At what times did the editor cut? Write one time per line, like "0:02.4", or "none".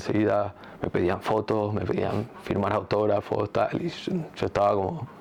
none